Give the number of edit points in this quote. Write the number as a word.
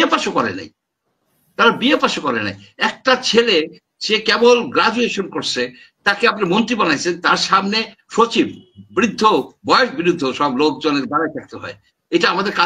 zero